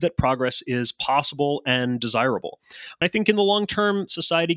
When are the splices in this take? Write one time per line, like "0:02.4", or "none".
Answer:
0:03.0